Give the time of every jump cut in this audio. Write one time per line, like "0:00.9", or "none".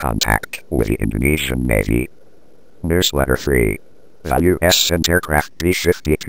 0:02.8